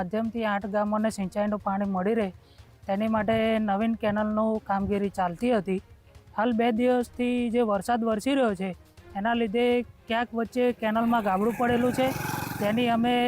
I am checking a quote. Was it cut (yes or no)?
no